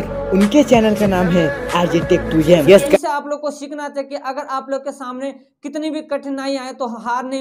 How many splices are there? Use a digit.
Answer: 1